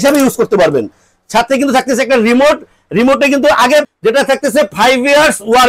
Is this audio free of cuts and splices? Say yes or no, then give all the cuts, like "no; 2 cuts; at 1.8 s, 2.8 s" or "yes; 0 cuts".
no; 1 cut; at 3.8 s